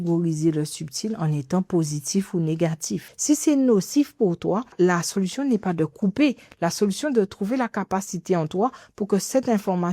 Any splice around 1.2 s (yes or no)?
no